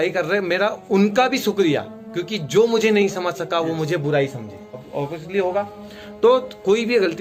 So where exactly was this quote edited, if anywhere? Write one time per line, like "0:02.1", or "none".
0:04.9